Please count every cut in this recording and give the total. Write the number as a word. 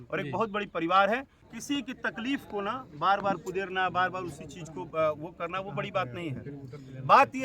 one